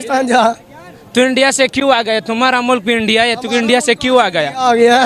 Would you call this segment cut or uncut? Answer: uncut